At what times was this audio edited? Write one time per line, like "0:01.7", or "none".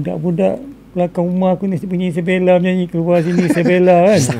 none